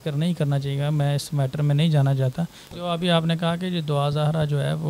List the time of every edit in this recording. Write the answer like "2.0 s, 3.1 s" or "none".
2.6 s